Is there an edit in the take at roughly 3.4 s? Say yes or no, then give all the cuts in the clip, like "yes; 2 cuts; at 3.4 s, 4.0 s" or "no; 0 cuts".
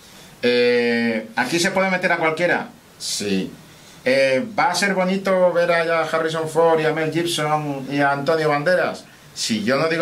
no; 1 cut; at 6.5 s